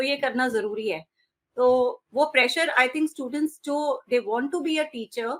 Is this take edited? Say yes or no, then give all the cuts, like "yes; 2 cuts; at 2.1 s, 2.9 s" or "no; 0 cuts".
no; 0 cuts